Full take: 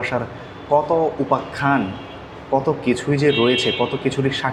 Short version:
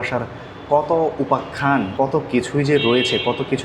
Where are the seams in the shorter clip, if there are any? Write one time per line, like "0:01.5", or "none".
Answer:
0:01.9

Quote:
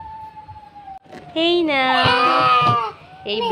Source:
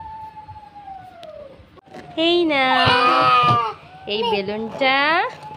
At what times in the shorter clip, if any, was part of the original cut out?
0:01.0

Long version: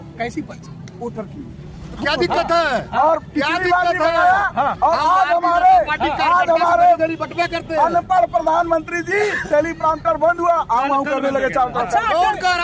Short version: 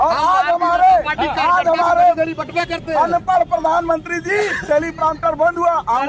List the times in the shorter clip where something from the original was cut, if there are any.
none

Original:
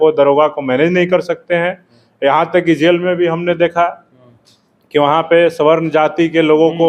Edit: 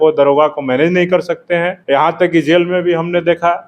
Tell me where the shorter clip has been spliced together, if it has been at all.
0:01.8

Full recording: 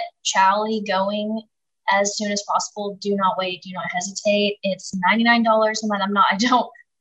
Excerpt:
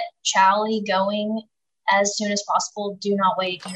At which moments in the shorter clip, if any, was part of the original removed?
none

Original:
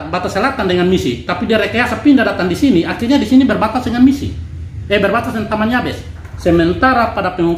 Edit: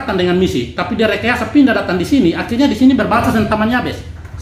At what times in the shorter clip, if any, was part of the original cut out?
0:03.2

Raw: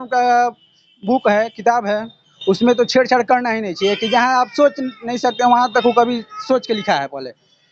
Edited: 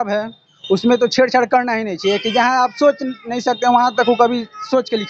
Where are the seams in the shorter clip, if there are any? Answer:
none

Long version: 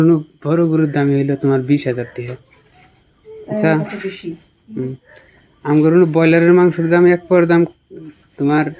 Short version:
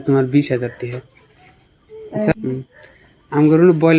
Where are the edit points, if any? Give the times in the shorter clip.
0:02.3

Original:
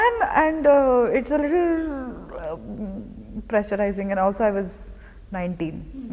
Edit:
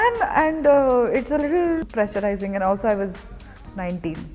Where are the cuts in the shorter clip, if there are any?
0:01.9

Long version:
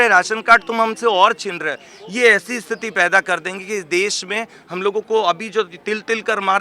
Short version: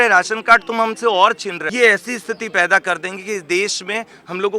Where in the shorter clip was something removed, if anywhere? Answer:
0:01.6

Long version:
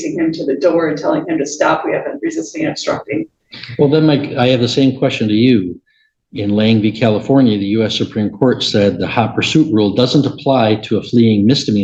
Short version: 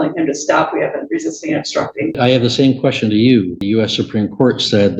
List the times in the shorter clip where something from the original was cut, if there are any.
0:02.1
0:03.6

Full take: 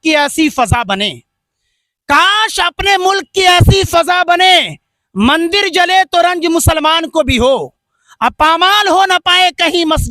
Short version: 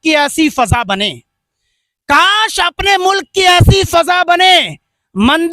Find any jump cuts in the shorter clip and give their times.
none

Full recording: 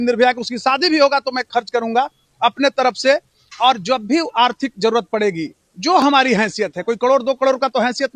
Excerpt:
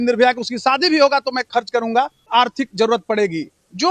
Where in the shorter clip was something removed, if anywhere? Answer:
0:02.3

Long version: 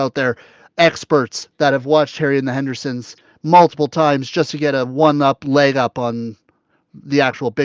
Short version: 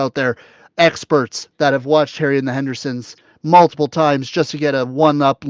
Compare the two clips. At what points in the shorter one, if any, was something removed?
none

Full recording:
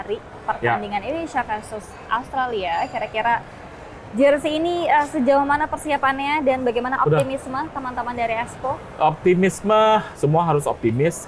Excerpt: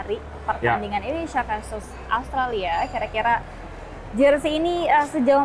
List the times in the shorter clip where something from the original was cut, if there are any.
none

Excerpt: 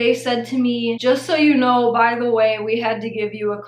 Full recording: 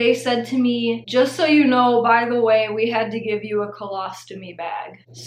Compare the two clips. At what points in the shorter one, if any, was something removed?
0:01.0

